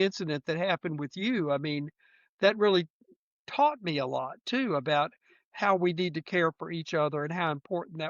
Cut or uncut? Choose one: uncut